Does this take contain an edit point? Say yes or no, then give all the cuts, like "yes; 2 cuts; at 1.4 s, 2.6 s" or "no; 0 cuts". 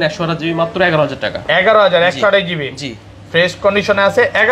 no; 0 cuts